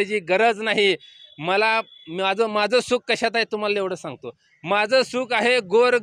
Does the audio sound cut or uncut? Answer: uncut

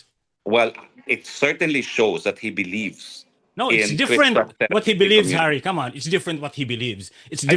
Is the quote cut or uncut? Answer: uncut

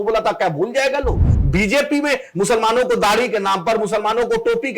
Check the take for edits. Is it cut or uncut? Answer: cut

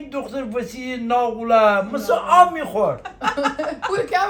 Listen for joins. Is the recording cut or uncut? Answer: uncut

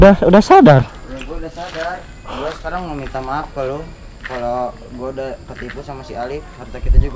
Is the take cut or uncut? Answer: uncut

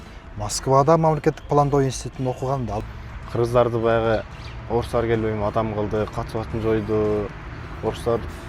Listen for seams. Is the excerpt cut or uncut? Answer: cut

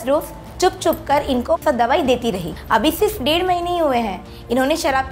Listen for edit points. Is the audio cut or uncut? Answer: cut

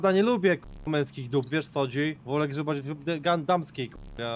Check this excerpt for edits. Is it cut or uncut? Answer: uncut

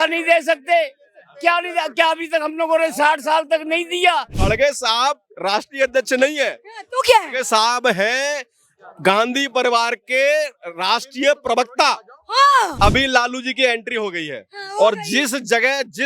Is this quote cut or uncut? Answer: cut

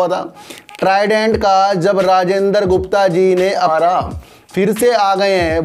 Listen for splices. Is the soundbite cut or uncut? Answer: cut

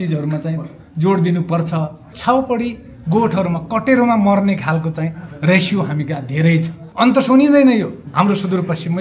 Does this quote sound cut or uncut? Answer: cut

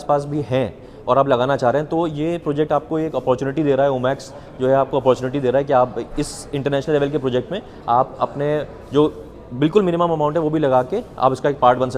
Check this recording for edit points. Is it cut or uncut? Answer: uncut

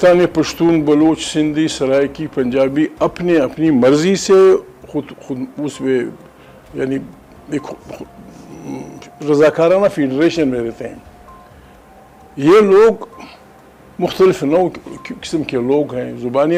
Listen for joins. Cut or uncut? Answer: uncut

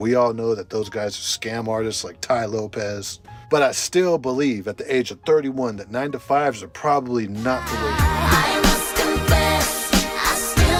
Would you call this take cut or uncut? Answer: uncut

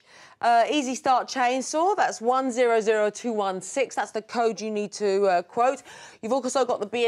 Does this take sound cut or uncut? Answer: uncut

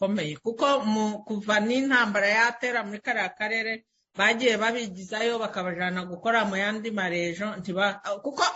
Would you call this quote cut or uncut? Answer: uncut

